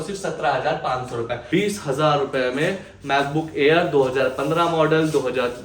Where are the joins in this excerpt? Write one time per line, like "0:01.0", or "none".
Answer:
0:01.4